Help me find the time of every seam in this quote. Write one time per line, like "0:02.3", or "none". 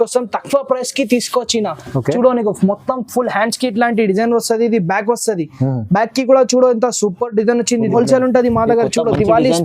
0:07.9